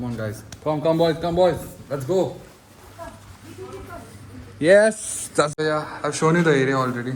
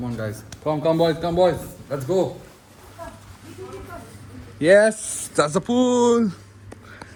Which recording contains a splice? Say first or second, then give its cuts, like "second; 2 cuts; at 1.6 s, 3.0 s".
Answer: first; 1 cut; at 5.5 s